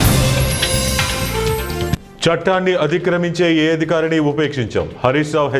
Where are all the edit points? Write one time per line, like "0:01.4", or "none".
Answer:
0:01.9